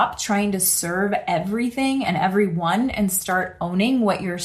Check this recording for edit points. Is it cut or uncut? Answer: uncut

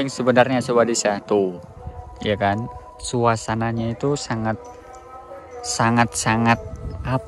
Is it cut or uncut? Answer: uncut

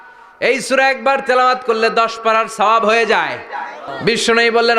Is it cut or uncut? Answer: cut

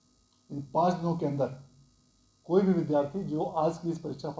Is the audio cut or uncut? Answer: uncut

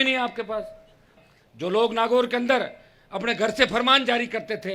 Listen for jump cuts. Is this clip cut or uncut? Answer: cut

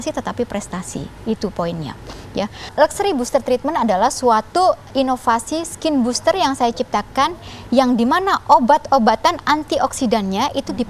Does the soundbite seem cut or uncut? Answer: cut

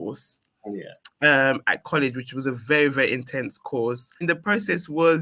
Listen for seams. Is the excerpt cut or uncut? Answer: cut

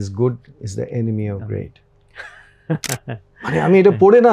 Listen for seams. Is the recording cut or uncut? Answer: uncut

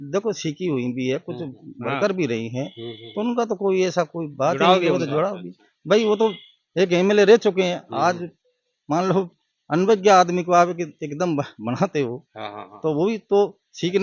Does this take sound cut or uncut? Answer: uncut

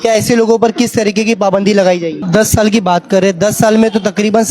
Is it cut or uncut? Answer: cut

